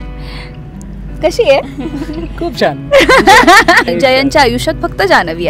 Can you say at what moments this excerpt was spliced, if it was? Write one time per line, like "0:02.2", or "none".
0:03.9